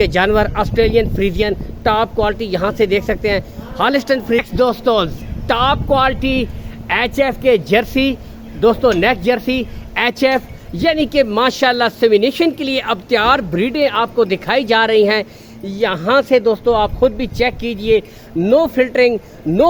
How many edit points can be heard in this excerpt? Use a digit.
1